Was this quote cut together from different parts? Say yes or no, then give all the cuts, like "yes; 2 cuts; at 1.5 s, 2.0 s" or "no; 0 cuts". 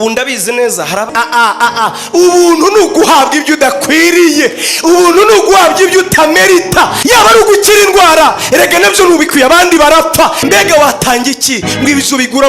yes; 3 cuts; at 1.1 s, 7.0 s, 10.4 s